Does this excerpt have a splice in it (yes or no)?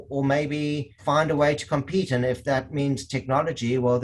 yes